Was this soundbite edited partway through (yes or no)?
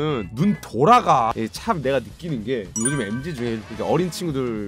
yes